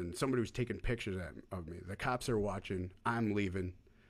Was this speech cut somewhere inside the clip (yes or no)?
no